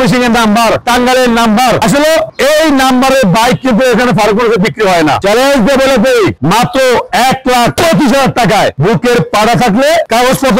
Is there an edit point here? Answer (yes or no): yes